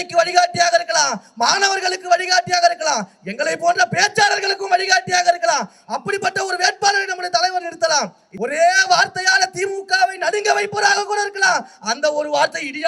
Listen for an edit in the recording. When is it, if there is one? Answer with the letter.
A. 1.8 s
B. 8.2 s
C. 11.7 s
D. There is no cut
B